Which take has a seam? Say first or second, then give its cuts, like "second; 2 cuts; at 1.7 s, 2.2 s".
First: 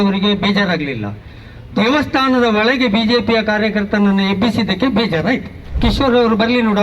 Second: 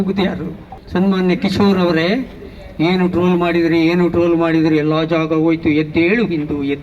first; 1 cut; at 5.8 s